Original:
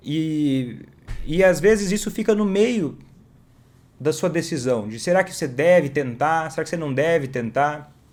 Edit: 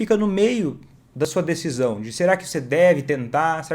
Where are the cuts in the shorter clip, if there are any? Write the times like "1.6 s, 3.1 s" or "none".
1.3 s

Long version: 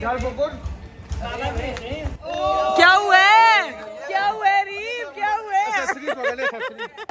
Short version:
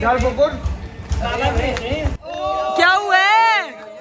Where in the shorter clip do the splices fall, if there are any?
none

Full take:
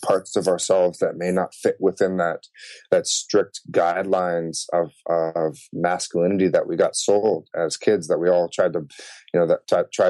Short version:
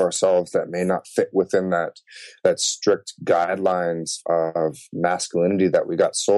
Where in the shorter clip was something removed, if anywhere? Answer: 4.1 s

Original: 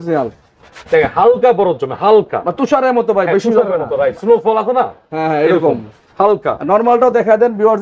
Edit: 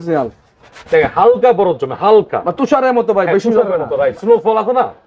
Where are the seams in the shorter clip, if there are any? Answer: none

